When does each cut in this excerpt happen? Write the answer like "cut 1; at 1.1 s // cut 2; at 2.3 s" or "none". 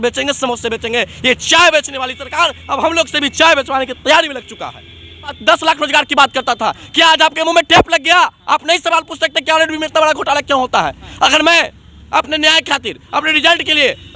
cut 1; at 5.4 s